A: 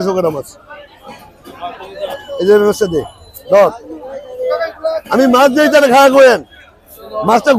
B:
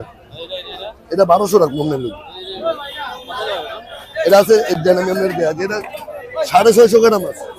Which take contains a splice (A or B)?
A